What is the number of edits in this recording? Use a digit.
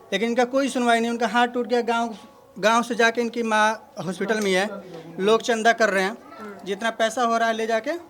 0